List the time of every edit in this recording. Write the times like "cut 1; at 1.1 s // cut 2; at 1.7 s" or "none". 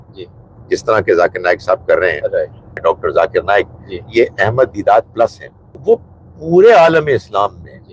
cut 1; at 2.8 s // cut 2; at 5.8 s